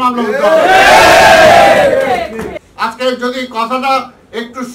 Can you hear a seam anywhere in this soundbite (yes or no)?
yes